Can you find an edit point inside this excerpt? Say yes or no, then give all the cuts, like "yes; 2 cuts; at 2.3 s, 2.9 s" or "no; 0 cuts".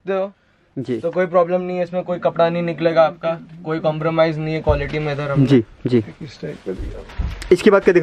no; 0 cuts